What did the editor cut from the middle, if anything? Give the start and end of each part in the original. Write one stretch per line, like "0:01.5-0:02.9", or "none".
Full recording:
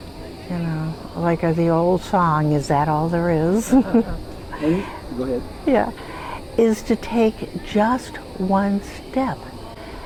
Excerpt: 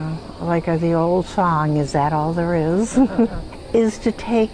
0:04.3-0:06.3